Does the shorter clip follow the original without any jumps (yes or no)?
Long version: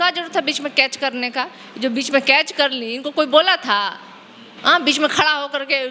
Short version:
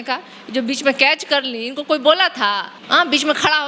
no